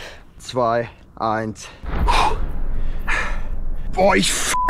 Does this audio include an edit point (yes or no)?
no